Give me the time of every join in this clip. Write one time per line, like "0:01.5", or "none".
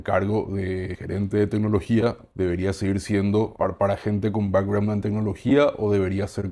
0:01.0
0:02.2
0:03.5